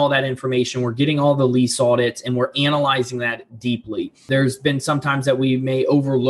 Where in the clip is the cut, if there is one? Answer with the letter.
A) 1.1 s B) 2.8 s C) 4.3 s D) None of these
C